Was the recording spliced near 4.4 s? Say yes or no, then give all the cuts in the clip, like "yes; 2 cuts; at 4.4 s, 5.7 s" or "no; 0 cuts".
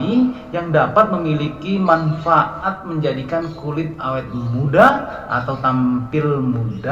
no; 1 cut; at 2.6 s